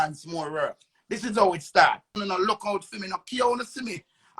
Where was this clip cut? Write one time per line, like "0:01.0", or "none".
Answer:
0:02.2